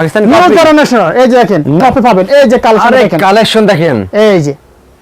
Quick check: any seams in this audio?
yes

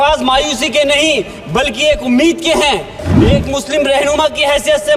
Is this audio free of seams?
no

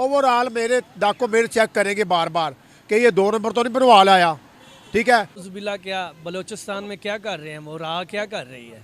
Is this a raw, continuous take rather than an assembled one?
no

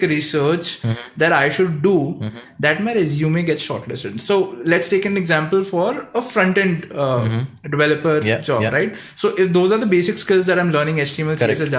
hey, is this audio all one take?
yes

